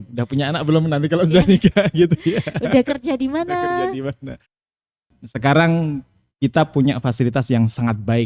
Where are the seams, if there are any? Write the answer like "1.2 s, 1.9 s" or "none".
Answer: 5.1 s